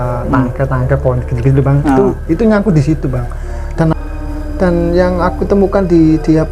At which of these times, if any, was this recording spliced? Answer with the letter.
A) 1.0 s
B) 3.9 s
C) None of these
B